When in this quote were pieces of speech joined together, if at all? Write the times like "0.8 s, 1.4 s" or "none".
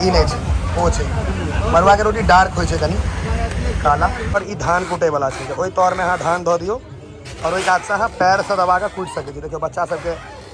4.3 s